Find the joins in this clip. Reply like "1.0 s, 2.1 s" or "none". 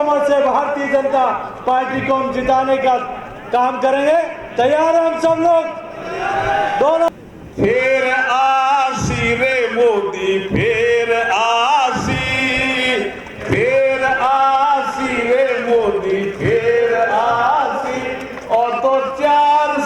7.1 s